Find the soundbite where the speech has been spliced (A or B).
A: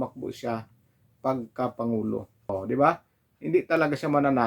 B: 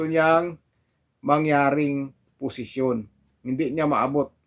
A